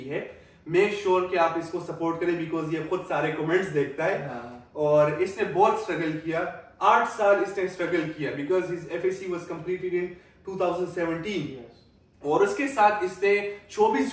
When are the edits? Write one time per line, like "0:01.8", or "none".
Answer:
none